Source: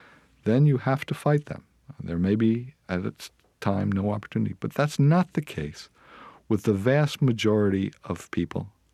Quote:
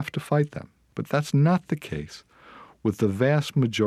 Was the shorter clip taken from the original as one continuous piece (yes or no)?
no